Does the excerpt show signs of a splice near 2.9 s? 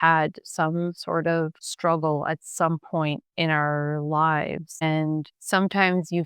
no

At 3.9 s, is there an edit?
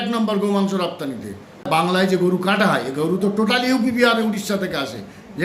no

